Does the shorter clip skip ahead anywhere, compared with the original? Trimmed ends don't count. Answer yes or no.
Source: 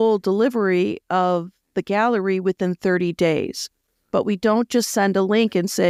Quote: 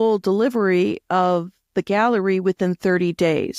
no